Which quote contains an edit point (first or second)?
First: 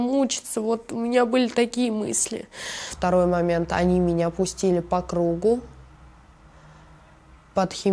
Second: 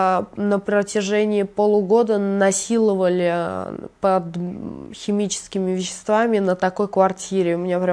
first